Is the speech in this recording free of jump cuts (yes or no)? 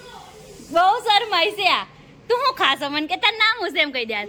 yes